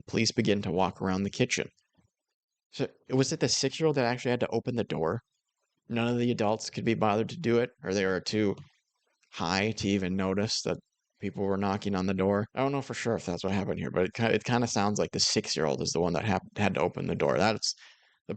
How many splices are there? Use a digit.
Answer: 1